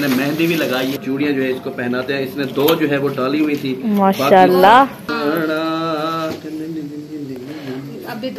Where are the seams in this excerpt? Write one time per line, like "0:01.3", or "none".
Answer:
0:01.0
0:05.0